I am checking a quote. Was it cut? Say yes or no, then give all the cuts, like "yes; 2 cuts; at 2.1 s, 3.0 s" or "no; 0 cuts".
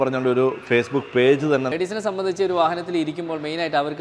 yes; 1 cut; at 1.7 s